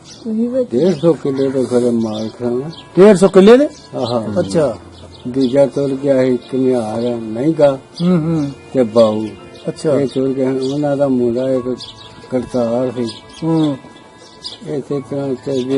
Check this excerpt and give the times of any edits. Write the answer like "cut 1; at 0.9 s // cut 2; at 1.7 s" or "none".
cut 1; at 4.9 s